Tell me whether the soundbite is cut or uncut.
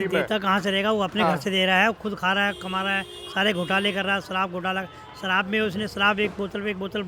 uncut